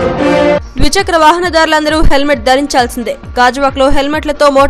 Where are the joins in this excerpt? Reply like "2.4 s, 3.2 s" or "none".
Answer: 1.0 s